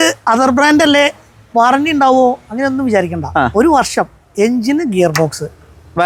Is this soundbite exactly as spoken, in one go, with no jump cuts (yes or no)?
yes